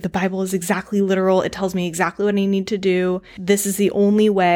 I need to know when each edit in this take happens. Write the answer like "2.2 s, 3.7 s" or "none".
3.3 s